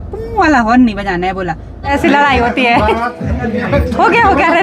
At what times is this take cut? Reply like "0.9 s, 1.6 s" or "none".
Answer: 1.8 s